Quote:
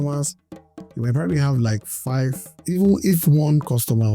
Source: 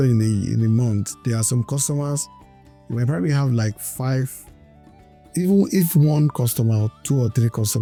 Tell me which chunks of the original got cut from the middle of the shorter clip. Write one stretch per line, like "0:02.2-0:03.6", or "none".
0:04.4-0:05.2

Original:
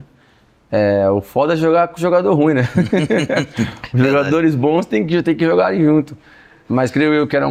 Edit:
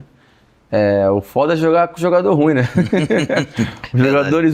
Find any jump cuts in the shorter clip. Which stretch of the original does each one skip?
none

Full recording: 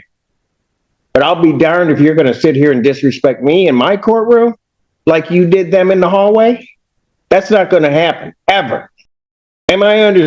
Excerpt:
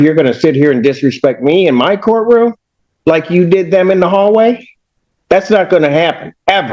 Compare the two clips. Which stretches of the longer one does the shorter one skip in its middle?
none

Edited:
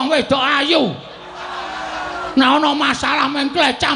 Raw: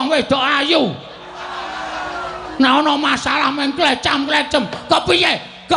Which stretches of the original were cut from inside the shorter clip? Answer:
0:02.3-0:02.5

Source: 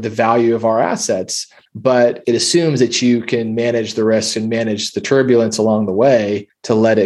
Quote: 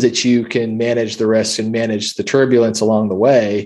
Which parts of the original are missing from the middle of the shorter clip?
none

